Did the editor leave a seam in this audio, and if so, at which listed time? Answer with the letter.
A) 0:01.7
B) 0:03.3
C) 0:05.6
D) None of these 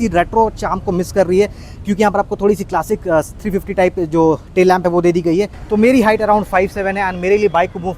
C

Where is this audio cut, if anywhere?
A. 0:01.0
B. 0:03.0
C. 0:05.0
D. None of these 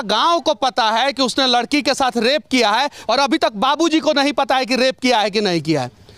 B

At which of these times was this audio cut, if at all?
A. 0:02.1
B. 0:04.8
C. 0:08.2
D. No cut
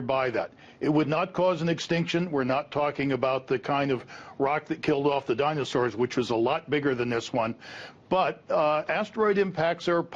A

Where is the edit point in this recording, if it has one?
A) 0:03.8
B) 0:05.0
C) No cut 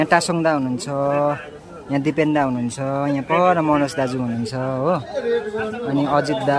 C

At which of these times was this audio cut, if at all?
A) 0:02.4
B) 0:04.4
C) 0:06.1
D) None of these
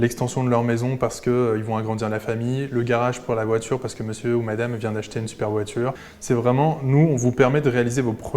C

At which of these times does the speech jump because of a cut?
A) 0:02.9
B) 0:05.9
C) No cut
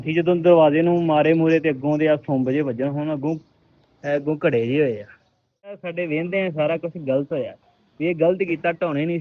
B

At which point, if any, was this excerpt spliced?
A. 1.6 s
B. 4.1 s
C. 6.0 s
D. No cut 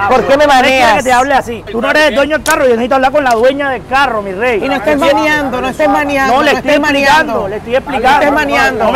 A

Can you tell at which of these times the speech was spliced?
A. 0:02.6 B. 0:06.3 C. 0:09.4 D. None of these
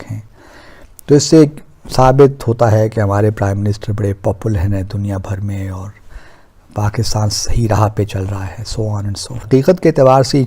C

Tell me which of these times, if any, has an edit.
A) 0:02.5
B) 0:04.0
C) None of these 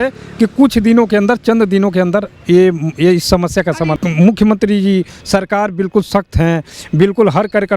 B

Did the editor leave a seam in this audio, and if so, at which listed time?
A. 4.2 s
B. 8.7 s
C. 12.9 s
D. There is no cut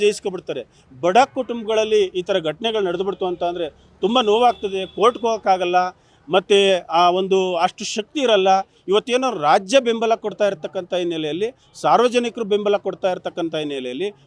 D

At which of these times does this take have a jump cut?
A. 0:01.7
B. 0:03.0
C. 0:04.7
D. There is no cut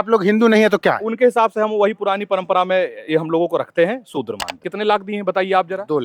C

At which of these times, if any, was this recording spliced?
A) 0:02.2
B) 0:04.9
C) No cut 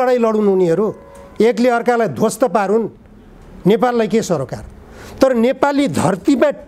C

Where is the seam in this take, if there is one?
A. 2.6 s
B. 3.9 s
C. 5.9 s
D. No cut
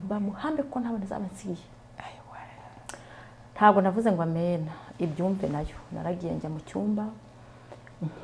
A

